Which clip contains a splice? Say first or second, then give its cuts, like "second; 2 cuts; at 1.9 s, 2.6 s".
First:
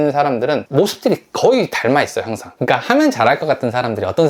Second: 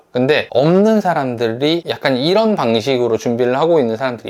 first; 1 cut; at 2.5 s